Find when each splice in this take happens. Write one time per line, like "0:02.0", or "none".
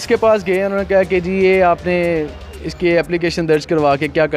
none